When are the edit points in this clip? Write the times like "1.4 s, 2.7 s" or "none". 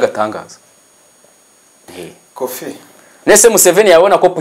1.9 s